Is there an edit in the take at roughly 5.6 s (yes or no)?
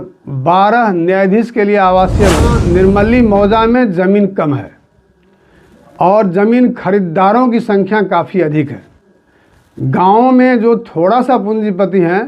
no